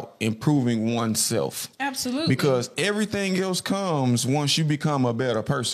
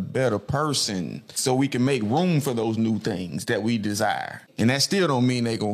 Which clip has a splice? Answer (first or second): second